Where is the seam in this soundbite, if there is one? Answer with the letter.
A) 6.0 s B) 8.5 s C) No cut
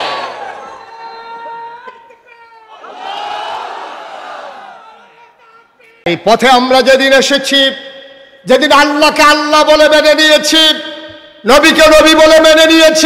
A